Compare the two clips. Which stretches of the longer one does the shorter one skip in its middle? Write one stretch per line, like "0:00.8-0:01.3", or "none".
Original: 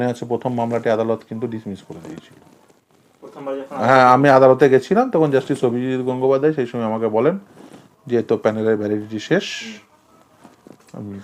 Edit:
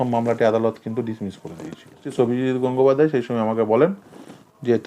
0:02.5-0:05.5